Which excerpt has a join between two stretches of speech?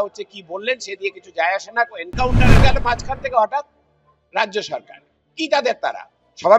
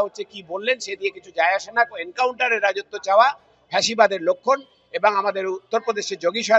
first; 1 cut; at 2.6 s

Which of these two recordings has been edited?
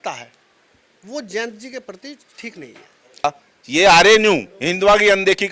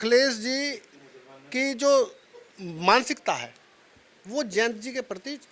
first; 1 cut; at 3.2 s

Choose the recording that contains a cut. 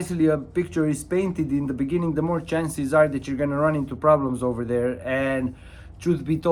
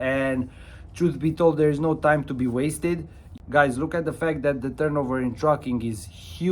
second; 1 cut; at 3.2 s

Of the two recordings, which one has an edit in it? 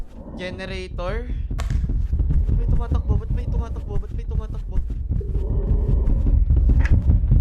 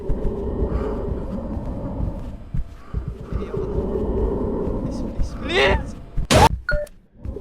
second; 1 cut; at 6.5 s

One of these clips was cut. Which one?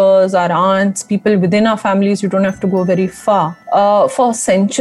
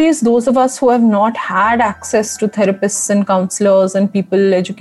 first; 1 cut; at 3.6 s

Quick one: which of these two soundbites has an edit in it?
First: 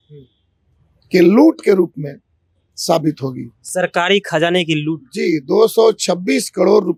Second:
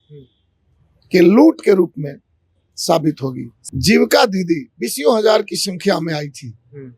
second; 1 cut; at 3.5 s

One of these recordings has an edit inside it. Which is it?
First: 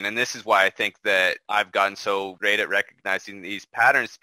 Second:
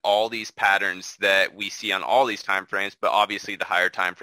first; 2 cuts; at 1.4 s, 2.3 s

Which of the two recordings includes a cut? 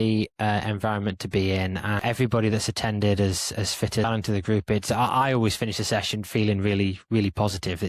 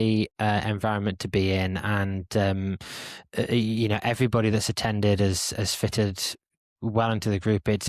first; 2 cuts; at 2.0 s, 4.0 s

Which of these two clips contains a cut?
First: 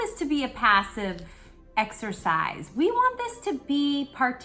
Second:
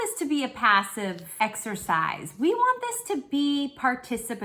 second; 1 cut; at 1.2 s

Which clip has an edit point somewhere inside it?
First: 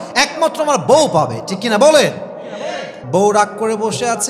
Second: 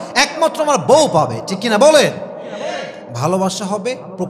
first; 1 cut; at 2.9 s

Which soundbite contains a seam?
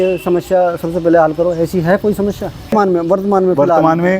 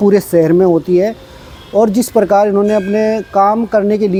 first; 1 cut; at 2.7 s

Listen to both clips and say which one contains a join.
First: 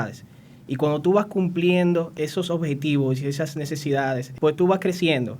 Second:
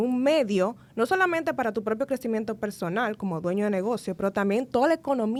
first; 2 cuts; at 2.1 s, 4.3 s

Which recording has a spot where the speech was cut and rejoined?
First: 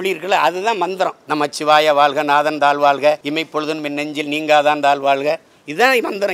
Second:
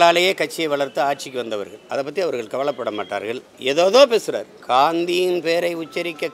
first; 2 cuts; at 1.2 s, 3.2 s

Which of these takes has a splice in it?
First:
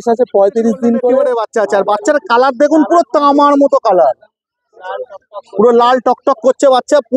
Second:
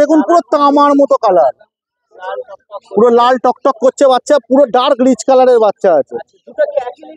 first; 1 cut; at 1.4 s

